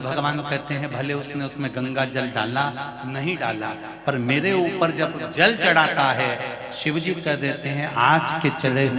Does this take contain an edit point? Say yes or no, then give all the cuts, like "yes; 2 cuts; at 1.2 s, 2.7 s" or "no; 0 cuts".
no; 0 cuts